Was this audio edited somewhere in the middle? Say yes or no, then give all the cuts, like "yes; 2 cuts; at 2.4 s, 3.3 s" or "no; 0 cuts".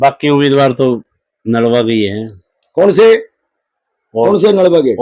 no; 0 cuts